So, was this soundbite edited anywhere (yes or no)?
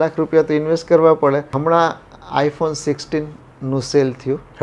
yes